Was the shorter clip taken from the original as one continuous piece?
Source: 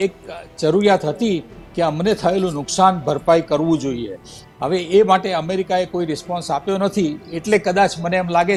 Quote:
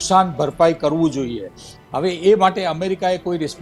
yes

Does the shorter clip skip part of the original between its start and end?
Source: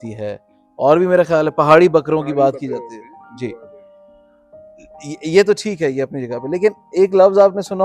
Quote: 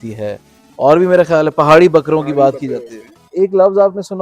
yes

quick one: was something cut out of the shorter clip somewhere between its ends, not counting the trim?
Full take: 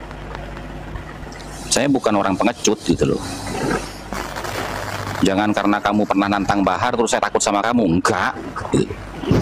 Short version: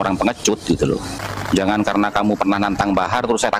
yes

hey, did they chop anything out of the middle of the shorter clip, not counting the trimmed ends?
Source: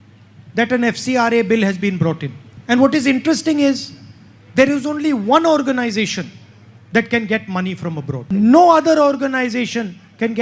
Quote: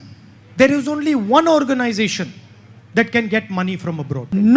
no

